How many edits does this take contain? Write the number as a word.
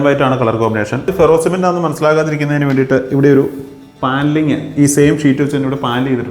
one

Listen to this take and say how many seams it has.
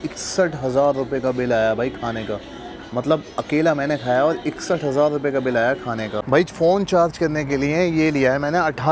one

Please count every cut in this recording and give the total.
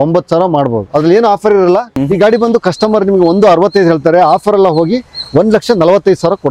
one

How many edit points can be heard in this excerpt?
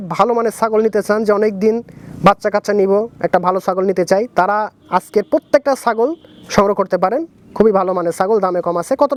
zero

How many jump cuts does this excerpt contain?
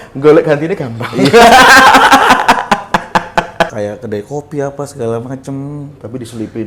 one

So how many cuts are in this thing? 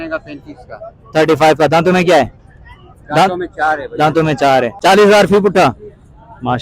one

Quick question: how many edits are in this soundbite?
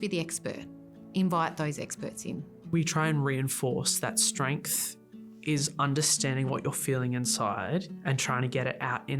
one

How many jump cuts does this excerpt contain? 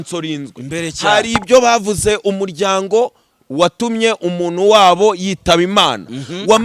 zero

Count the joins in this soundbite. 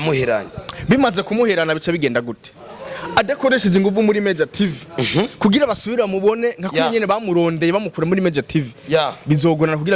zero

